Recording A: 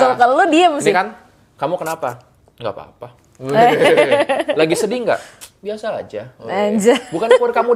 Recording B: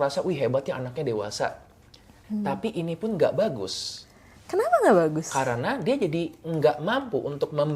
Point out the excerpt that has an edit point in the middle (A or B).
B